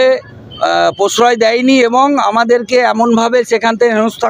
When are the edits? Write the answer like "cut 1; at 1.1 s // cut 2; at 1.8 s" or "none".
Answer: none